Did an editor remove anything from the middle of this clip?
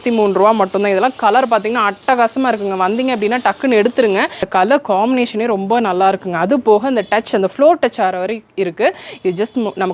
yes; 1 cut; at 4.4 s

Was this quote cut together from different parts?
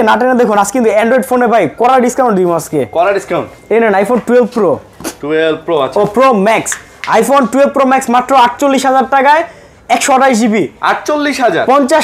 no; 0 cuts

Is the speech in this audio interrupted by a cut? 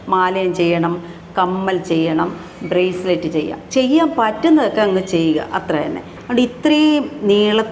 yes; 1 cut; at 6.1 s

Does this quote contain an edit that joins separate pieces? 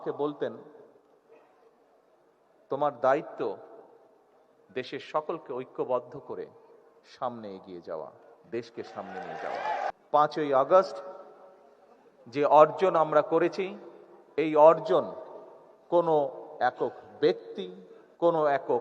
yes; 1 cut; at 9.9 s

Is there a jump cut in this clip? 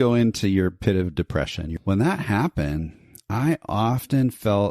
yes; 1 cut; at 1.7 s

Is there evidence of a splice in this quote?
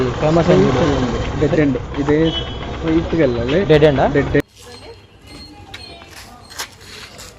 yes; 1 cut; at 4.4 s

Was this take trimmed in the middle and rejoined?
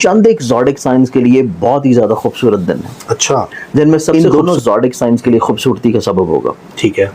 yes; 1 cut; at 4.1 s

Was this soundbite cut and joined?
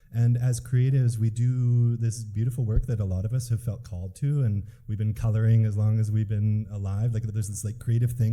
yes; 1 cut; at 7.3 s

